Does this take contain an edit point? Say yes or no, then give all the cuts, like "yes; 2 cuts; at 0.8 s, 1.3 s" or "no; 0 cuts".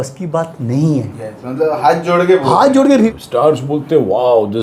yes; 1 cut; at 3.1 s